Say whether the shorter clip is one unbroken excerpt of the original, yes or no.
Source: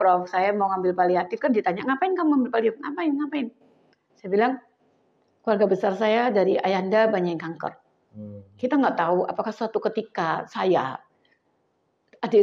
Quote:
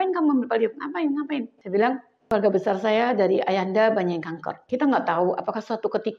no